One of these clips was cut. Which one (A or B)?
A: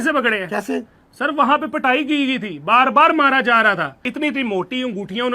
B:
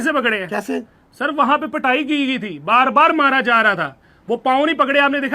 A